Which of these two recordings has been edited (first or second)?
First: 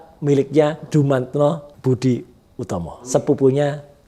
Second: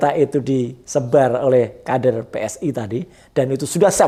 first